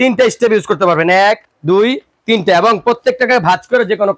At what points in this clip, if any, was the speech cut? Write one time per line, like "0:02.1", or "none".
none